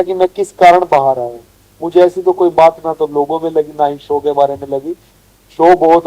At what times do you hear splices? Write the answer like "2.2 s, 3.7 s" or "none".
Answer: none